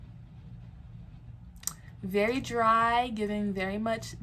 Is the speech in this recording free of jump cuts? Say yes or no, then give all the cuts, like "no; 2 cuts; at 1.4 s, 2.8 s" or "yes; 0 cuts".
yes; 0 cuts